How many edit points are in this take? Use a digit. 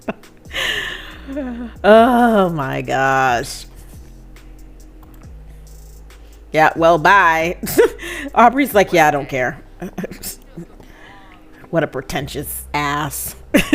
1